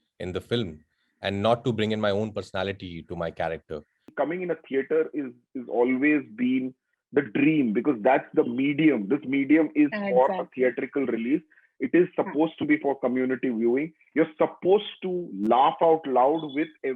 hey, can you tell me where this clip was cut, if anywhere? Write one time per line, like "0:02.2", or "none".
0:04.0